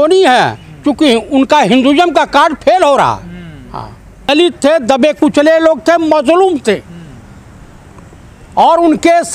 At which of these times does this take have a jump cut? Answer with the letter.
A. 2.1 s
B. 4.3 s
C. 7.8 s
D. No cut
B